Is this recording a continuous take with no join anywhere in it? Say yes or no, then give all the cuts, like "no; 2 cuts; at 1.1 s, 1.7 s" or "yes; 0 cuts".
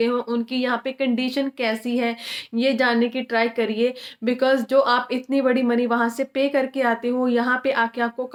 yes; 0 cuts